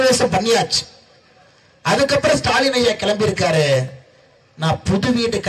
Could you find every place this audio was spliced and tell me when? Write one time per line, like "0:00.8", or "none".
none